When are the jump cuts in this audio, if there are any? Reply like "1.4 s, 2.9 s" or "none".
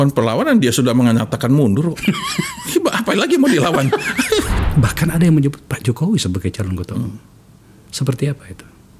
4.6 s